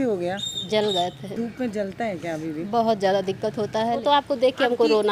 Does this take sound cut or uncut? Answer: cut